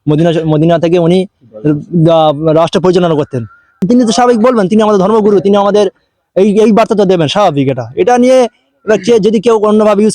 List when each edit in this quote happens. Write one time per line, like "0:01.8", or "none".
0:03.8